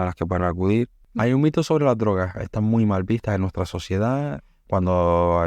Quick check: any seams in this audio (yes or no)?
yes